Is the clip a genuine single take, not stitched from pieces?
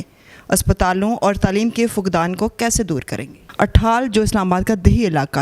no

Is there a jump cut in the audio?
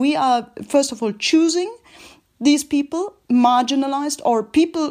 no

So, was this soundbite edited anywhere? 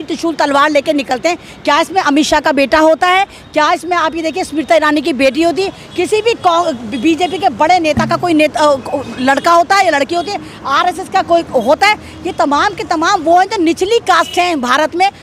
no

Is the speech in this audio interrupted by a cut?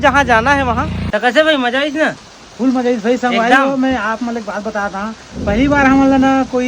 yes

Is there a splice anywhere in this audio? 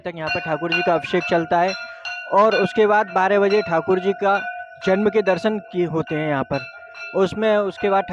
no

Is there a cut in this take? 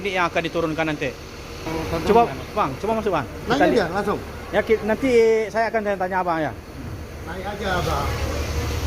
yes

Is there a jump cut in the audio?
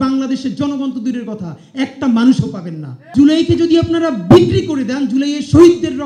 yes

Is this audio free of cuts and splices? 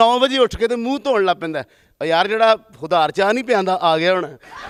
yes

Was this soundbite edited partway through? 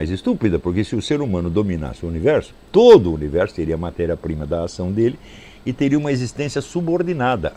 no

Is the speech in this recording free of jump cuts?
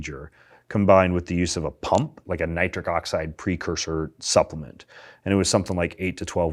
no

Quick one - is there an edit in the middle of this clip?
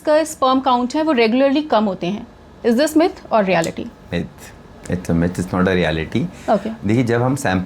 no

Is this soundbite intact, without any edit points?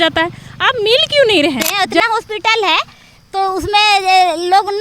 no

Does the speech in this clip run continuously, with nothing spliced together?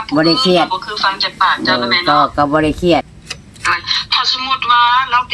no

